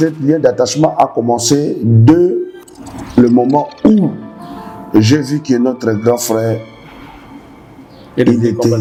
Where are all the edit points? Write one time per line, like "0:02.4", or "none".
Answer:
none